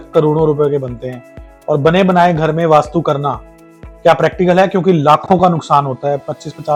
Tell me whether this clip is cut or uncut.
uncut